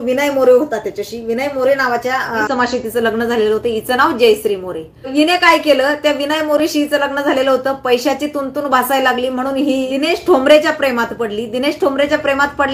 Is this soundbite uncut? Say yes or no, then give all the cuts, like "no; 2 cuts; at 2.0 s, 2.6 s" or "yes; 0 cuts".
no; 3 cuts; at 2.5 s, 5.1 s, 9.9 s